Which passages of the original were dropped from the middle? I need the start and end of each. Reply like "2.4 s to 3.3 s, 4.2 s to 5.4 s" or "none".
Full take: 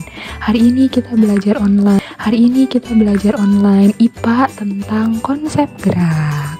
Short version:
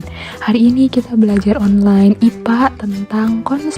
1.9 s to 3.7 s

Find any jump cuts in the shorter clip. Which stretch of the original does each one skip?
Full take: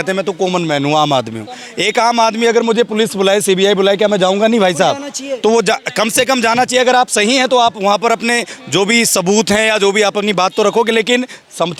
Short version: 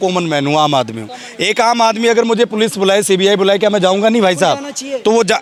none

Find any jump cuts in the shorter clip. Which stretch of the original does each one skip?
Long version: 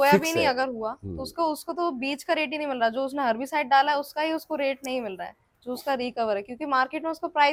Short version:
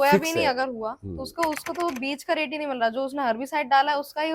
none

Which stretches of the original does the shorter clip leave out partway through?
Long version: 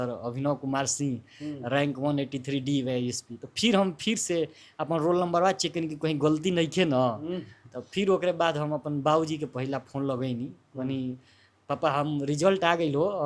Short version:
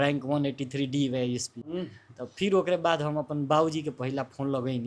3.4 s to 7.3 s

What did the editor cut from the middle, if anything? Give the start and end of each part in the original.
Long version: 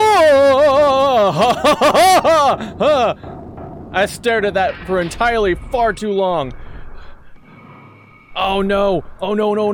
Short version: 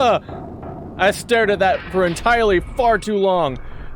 none

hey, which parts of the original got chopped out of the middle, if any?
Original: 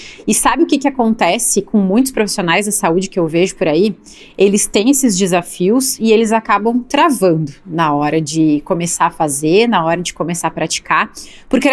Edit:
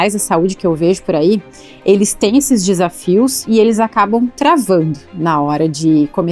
none

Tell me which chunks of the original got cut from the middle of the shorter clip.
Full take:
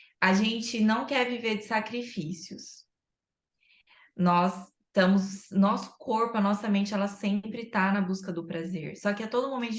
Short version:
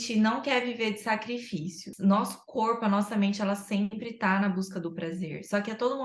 2.5 s to 5.4 s

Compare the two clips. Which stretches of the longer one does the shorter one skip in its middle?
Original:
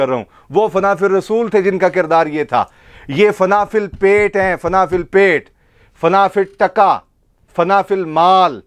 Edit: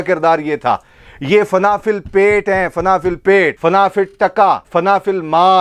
5.4 s to 5.9 s, 7.0 s to 7.5 s

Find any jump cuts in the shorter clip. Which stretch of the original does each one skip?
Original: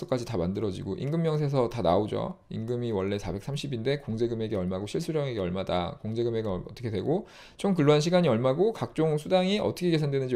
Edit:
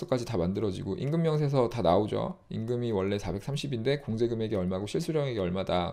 none

